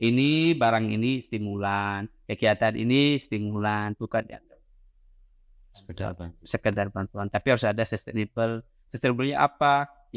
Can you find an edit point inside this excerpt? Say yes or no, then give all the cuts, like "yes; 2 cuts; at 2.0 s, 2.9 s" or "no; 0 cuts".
no; 0 cuts